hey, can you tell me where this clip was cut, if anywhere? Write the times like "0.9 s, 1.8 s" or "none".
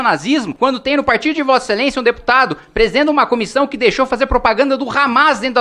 none